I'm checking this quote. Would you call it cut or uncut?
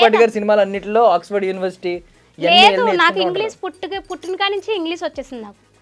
uncut